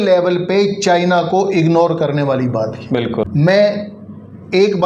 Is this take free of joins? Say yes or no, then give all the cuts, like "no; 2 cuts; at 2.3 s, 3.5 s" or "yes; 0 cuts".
no; 1 cut; at 3.3 s